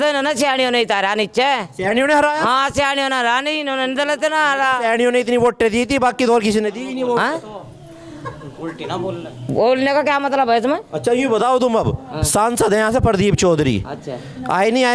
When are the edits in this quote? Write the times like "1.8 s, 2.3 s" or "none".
none

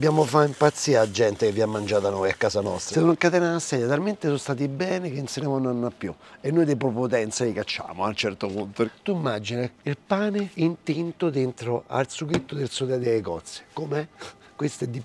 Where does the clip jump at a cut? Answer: 2.8 s, 8.9 s, 10.5 s, 13.0 s, 14.2 s

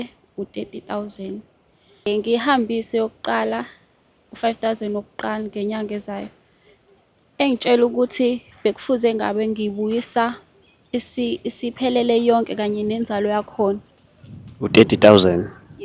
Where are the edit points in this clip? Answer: 2.1 s

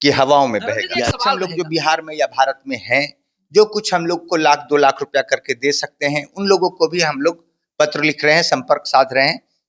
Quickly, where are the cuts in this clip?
1.4 s

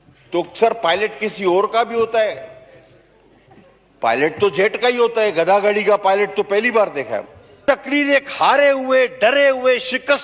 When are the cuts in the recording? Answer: 7.6 s

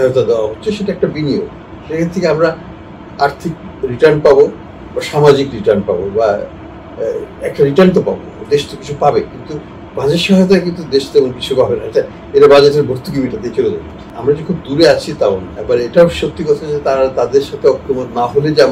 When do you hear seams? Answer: 14.1 s, 15.5 s

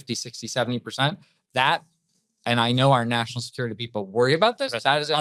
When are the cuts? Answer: none

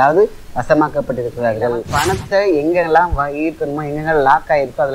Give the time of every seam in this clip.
1.9 s

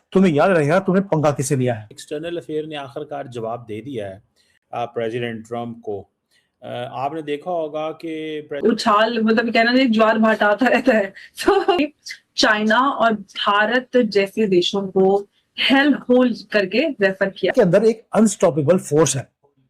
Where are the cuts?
1.9 s, 8.6 s, 11.8 s, 16.7 s, 17.5 s

